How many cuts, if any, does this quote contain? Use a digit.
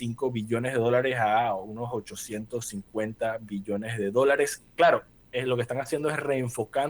0